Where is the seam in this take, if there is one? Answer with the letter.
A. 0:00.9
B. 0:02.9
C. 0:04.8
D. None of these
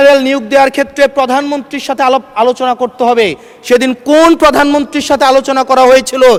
D